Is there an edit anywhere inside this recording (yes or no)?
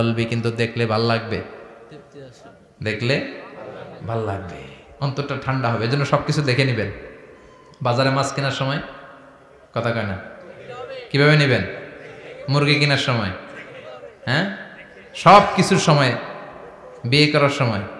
no